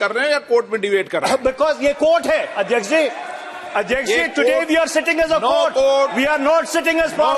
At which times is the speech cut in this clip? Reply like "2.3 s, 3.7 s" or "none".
none